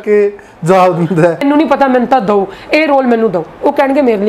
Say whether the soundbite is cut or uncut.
cut